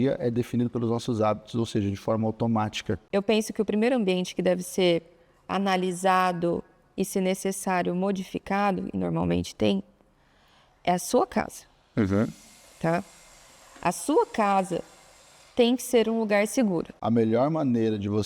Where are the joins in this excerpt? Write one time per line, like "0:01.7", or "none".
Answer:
0:02.9
0:16.9